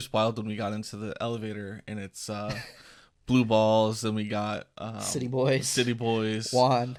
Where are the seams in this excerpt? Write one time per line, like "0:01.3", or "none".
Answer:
none

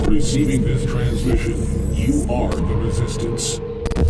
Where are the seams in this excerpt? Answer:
none

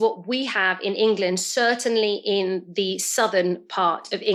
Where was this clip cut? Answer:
none

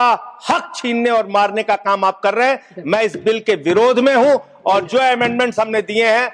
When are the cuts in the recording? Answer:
none

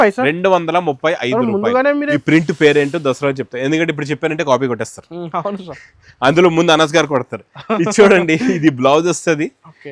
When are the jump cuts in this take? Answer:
0:02.1

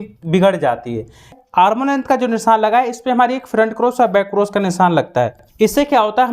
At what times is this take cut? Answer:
0:01.3
0:05.4

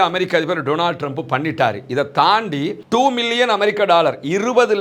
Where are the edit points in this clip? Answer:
0:02.8

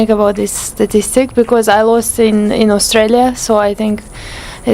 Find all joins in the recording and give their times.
none

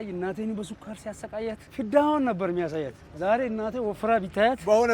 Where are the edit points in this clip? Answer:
0:01.6
0:03.0

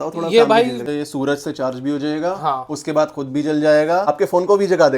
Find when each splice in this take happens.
0:00.8
0:04.1

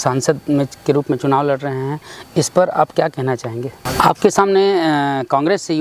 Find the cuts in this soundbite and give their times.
0:03.9

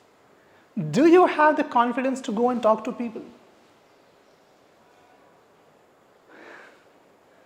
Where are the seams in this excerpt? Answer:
none

